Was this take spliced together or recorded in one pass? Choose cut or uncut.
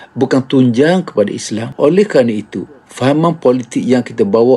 cut